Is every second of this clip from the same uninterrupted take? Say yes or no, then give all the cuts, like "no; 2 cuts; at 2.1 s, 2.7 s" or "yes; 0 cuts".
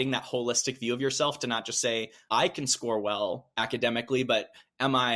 no; 2 cuts; at 2.1 s, 3.5 s